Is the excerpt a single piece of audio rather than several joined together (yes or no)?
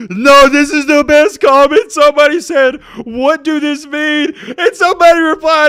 yes